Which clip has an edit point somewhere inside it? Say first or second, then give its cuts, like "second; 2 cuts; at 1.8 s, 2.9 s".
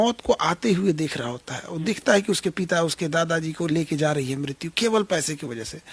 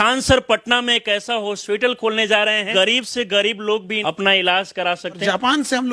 second; 3 cuts; at 2.7 s, 3.9 s, 5.2 s